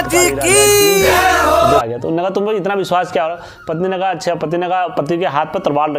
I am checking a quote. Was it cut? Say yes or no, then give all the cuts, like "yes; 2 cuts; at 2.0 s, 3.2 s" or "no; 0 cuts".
yes; 1 cut; at 1.8 s